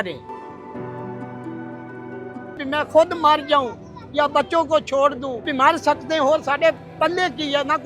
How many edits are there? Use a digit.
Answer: 2